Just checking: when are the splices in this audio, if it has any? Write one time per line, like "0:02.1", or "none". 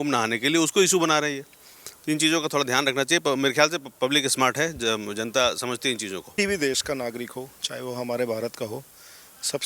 0:06.3

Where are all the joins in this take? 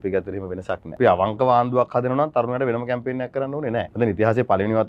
0:01.0
0:03.9

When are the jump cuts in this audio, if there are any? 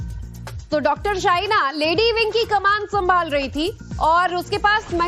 0:01.5

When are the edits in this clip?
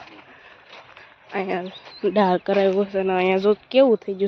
none

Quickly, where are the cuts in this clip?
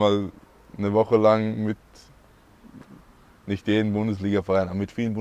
none

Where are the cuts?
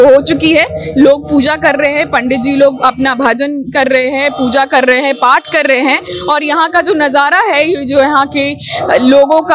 none

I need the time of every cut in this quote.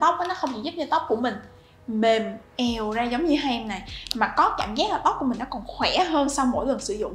none

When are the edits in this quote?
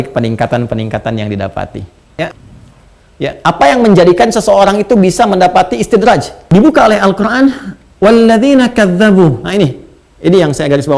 0:02.3
0:06.3

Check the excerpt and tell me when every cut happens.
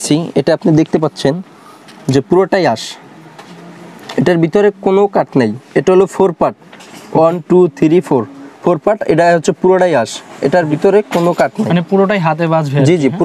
none

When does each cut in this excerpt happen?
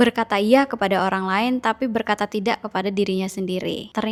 none

